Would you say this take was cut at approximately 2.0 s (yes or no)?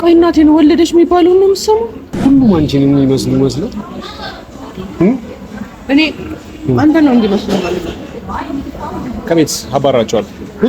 yes